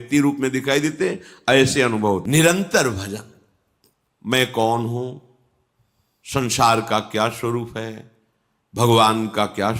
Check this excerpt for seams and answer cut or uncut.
cut